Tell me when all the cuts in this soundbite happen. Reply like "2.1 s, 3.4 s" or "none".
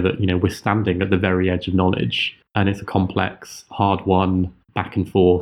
2.4 s